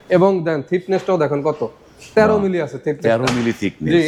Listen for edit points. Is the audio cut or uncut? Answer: uncut